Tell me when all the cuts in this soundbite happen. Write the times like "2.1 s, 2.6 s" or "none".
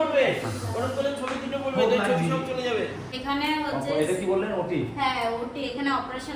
3.2 s